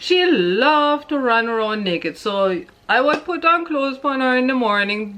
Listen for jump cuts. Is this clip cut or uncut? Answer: uncut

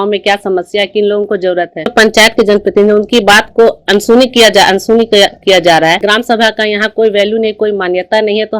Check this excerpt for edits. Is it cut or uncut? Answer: cut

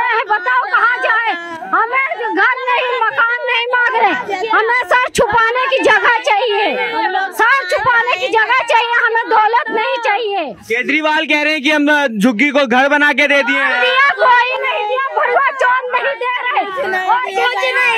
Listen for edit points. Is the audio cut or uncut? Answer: uncut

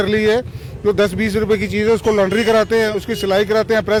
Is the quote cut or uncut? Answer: uncut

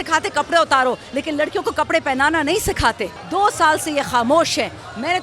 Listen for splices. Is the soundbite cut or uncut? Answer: cut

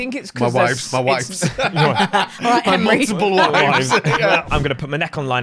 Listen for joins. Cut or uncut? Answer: cut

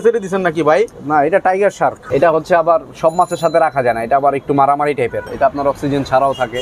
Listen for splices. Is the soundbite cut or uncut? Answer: cut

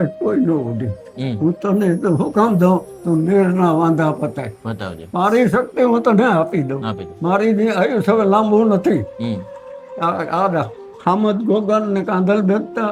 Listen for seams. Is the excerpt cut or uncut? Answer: uncut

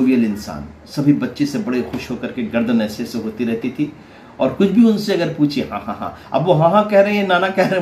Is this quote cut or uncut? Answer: uncut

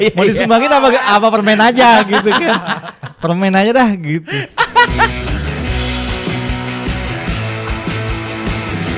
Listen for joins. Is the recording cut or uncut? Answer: cut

